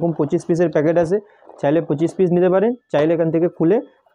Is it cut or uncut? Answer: uncut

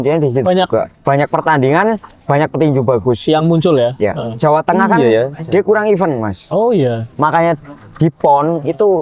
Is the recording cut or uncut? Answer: uncut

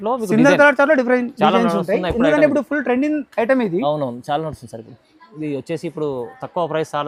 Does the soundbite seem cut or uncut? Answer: uncut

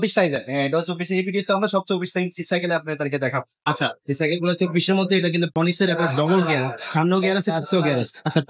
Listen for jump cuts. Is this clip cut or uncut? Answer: uncut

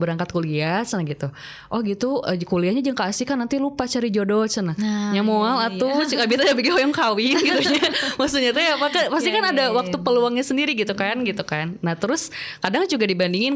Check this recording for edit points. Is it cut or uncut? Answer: uncut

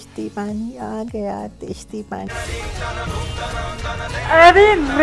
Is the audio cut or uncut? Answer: cut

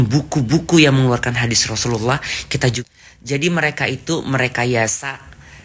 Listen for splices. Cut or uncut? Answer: cut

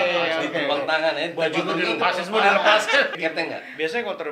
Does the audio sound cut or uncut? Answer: cut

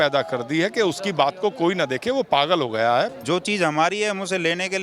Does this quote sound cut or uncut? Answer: cut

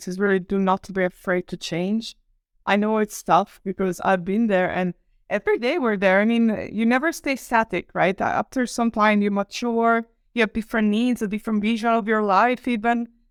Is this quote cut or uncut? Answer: uncut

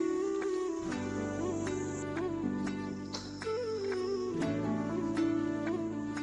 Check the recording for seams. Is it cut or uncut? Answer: uncut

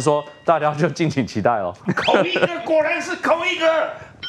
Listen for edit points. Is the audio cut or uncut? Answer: cut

